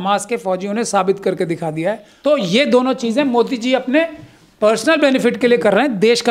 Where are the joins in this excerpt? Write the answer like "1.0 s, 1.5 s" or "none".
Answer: 2.1 s